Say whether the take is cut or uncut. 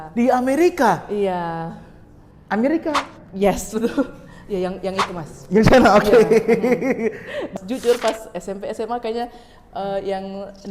cut